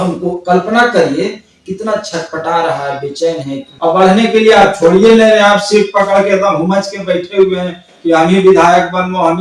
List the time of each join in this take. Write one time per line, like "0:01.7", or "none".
0:03.6